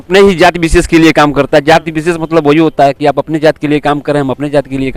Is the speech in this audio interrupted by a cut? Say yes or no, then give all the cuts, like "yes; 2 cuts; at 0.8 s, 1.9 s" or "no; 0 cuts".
no; 0 cuts